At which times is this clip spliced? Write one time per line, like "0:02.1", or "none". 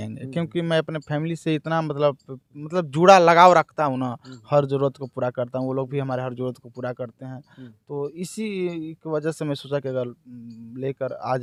none

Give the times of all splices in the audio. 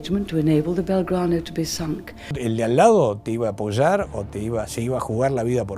0:02.4

